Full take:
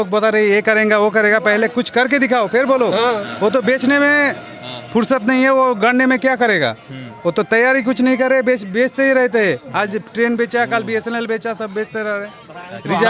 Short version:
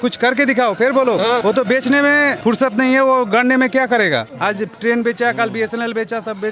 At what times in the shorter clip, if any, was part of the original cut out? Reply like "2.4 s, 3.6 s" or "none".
1.4 s, 2.4 s, 4.3 s